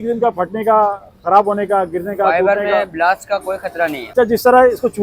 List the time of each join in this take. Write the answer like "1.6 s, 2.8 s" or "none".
4.0 s